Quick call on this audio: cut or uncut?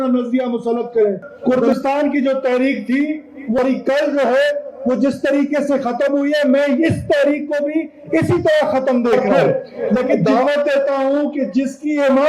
cut